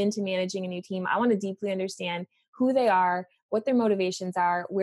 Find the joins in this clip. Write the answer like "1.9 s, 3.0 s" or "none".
none

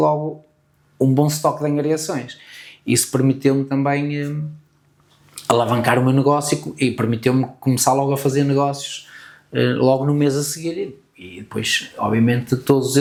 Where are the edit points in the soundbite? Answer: none

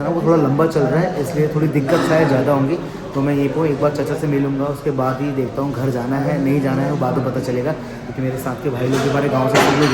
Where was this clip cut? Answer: none

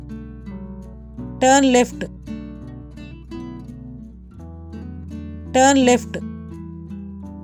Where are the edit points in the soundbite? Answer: none

